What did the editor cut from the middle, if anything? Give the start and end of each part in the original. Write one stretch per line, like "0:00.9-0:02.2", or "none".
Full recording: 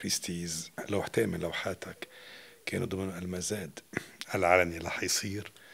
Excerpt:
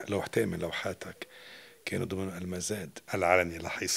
0:03.8-0:04.2